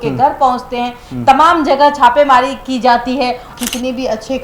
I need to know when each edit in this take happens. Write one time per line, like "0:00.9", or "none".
0:03.5

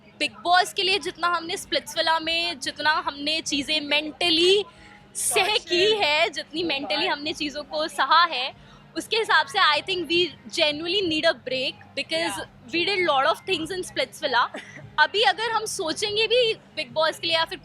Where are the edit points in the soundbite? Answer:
none

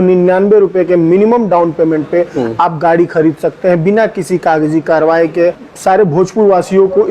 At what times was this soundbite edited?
0:05.7

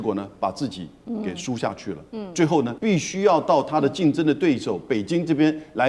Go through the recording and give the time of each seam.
0:00.9
0:02.7

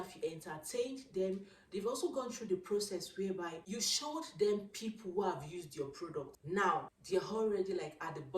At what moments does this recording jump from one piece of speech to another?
0:03.7
0:06.4
0:06.9

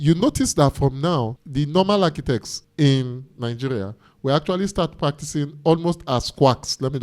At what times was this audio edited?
0:01.4
0:02.6

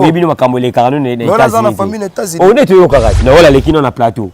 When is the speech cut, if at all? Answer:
0:03.1

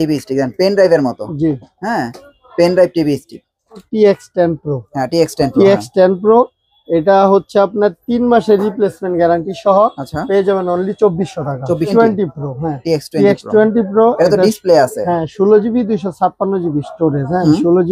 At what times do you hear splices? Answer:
0:03.9
0:11.9

